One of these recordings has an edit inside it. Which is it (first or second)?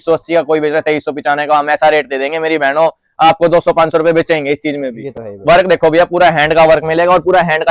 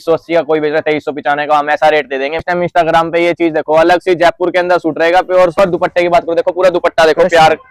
second